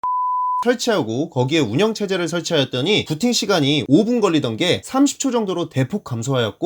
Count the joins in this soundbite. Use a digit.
1